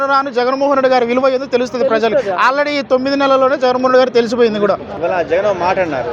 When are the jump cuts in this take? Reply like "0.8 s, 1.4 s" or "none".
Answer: 4.9 s